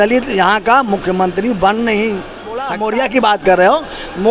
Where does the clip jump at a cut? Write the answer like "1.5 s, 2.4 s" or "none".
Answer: 2.7 s